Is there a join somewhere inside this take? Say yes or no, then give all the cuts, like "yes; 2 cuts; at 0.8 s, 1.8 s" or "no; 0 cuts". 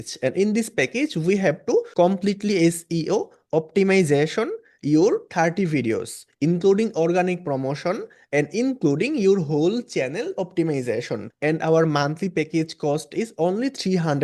yes; 1 cut; at 11.2 s